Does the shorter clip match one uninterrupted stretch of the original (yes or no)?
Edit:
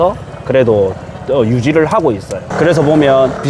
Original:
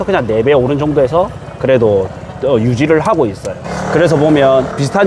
no